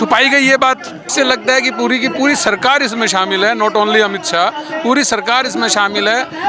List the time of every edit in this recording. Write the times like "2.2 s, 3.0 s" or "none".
1.1 s